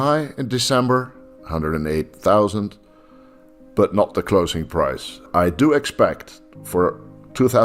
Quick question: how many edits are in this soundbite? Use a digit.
1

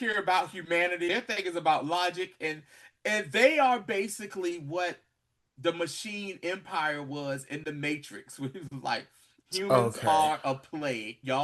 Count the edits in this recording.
1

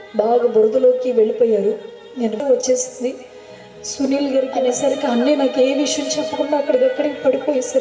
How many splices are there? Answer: 2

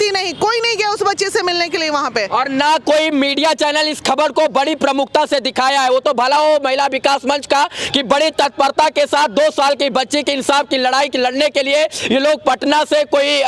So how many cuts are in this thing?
0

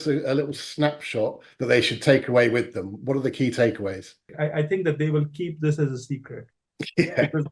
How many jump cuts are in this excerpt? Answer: 1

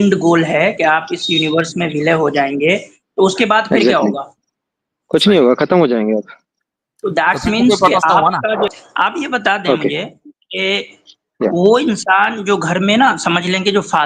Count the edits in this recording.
1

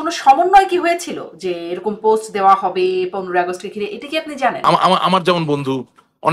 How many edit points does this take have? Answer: 1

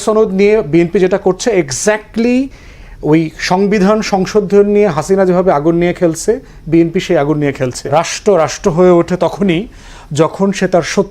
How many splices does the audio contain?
1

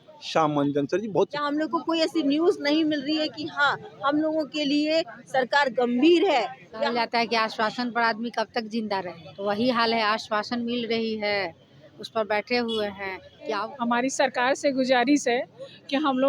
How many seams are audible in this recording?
4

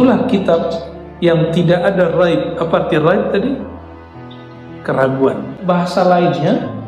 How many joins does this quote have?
1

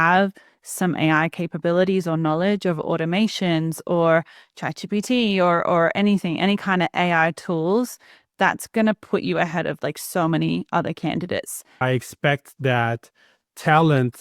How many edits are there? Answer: 1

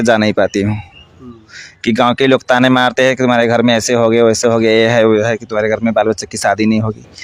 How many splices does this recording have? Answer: 0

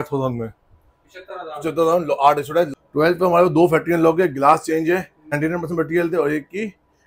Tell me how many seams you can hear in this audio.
2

